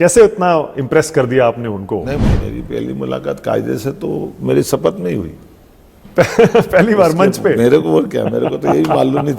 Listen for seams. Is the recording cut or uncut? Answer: cut